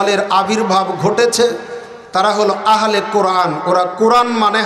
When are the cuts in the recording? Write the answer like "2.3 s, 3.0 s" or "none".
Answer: none